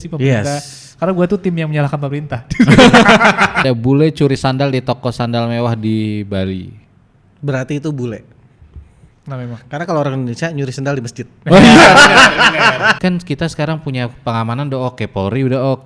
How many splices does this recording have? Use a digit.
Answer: 2